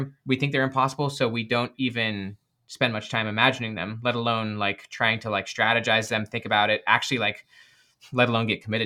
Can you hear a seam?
no; 0 cuts

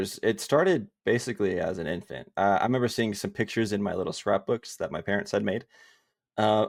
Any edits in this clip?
no; 0 cuts

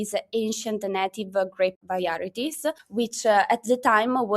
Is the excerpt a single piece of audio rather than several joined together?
no; 1 cut; at 1.8 s

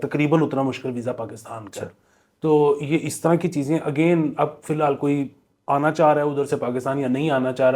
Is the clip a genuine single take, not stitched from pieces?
yes; 0 cuts

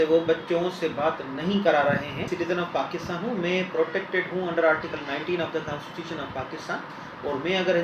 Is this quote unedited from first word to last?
no; 1 cut; at 2.3 s

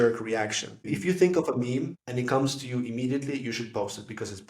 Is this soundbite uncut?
no; 2 cuts; at 0.9 s, 2.0 s

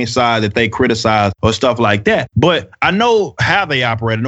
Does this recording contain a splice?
no; 0 cuts

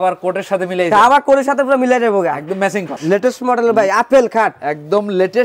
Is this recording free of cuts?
no; 1 cut; at 2.9 s

